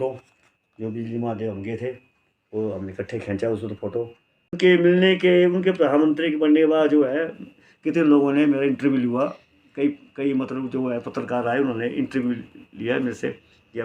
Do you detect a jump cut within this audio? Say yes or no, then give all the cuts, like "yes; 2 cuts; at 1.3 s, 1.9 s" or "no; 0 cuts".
yes; 1 cut; at 4.6 s